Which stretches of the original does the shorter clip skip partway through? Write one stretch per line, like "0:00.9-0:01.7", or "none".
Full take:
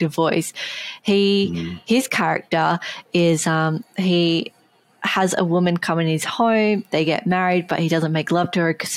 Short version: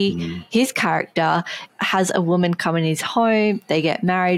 0:02.9-0:04.8

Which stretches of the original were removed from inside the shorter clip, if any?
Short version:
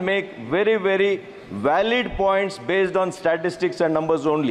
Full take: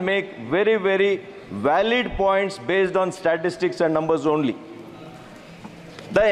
none

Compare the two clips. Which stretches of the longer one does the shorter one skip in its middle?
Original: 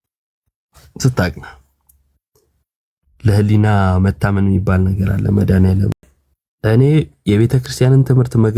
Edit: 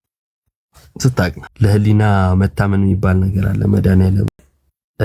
0:01.5-0:03.1

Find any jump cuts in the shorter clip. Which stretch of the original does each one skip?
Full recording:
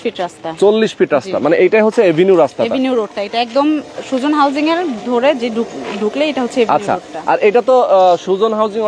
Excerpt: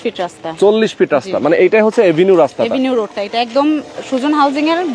none

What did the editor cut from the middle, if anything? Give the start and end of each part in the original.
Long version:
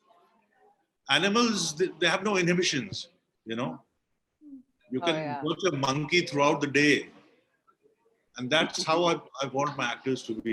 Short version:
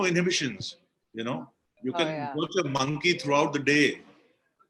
0:03.9-0:04.7

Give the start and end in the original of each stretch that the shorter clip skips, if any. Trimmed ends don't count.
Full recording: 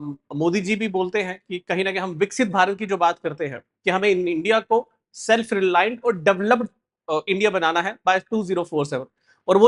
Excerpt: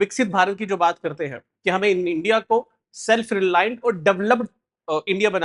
none

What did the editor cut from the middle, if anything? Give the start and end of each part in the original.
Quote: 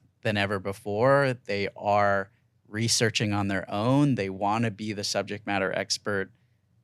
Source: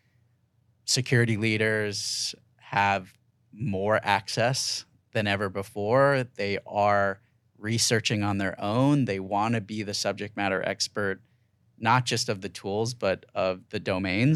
none

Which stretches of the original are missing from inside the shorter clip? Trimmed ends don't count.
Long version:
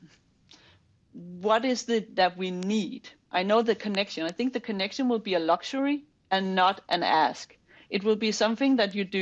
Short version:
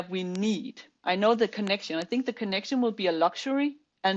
none

